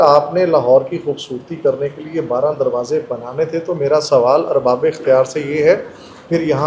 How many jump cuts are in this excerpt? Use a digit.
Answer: 0